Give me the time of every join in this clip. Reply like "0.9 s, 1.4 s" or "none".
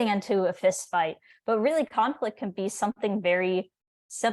none